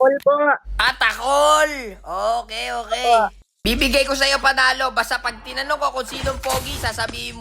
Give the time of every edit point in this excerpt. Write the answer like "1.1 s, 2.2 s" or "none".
3.5 s